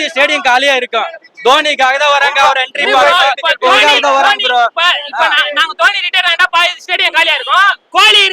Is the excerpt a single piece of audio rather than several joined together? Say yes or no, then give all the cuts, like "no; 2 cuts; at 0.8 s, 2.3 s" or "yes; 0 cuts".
yes; 0 cuts